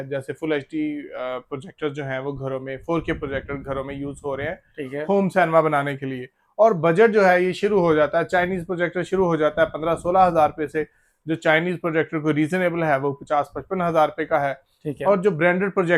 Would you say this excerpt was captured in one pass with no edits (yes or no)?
yes